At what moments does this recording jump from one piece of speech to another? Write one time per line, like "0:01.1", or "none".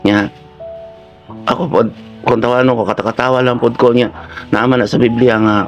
none

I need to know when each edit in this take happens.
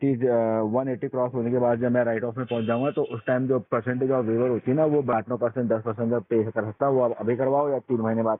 0:05.1

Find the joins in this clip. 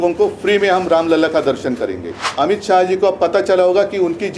0:02.2

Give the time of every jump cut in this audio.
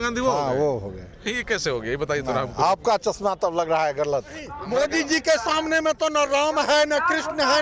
0:04.5

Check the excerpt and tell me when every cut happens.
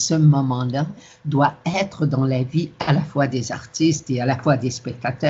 none

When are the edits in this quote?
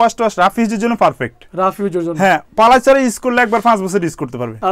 none

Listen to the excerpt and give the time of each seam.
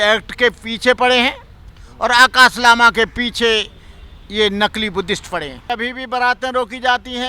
0:05.7

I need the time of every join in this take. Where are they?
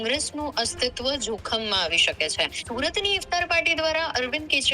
0:02.6

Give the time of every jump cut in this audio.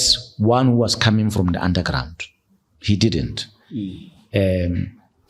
none

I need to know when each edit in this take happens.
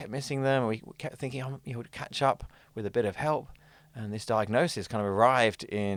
none

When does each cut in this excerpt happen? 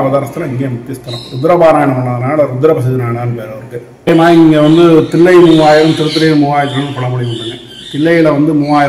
0:04.1

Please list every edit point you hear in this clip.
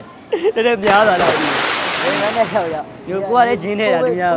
0:01.9

